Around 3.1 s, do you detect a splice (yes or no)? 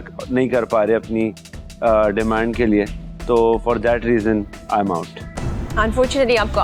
no